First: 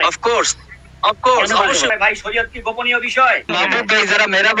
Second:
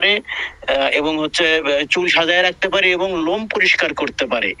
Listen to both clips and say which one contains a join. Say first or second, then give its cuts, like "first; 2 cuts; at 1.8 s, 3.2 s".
first; 2 cuts; at 1.9 s, 3.5 s